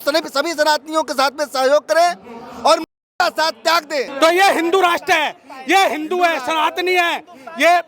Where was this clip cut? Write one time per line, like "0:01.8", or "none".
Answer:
0:04.1